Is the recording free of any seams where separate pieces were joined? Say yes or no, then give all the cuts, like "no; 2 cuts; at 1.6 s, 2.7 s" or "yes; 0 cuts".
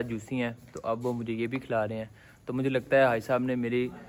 yes; 0 cuts